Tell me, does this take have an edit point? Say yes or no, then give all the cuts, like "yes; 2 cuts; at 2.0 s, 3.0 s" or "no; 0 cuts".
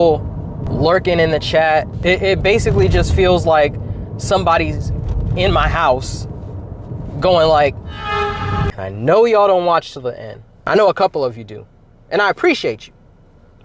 yes; 2 cuts; at 1.9 s, 8.7 s